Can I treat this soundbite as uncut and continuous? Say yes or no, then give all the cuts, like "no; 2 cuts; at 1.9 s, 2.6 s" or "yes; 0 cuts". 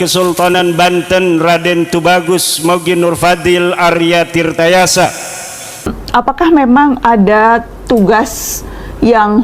no; 1 cut; at 5.9 s